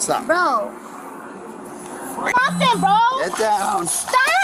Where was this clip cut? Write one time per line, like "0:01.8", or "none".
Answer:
0:02.3